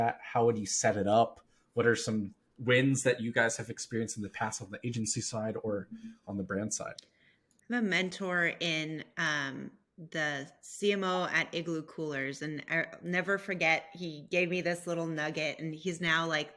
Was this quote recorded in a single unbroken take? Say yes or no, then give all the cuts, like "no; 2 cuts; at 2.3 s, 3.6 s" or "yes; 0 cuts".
yes; 0 cuts